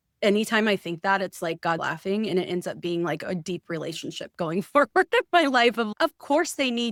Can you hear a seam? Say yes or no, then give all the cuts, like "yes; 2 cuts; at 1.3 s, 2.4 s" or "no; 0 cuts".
no; 0 cuts